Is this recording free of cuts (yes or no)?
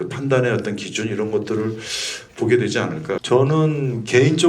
no